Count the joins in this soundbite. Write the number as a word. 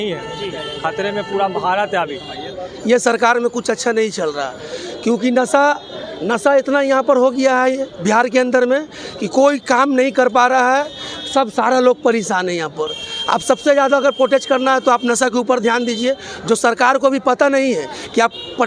one